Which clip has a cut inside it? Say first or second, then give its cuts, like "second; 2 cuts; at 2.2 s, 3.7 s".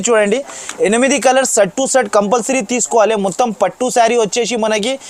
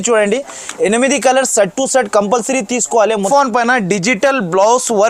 second; 1 cut; at 3.3 s